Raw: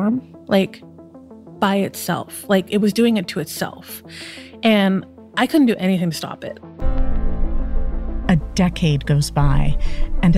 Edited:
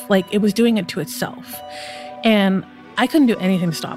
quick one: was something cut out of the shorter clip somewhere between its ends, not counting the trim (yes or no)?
no